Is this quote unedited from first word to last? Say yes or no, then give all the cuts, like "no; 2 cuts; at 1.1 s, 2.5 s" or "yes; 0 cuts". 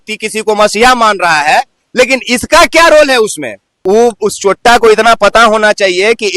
no; 1 cut; at 3.7 s